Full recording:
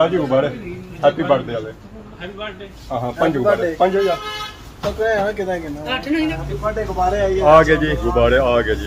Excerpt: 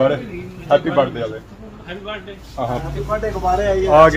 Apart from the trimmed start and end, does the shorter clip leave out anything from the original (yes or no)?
yes